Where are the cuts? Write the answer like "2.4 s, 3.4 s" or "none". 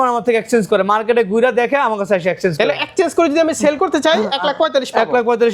none